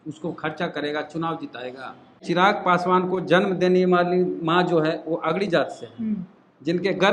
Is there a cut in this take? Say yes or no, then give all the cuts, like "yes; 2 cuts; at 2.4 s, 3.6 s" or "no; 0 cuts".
yes; 1 cut; at 2.2 s